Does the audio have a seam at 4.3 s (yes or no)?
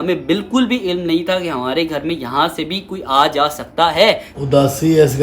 yes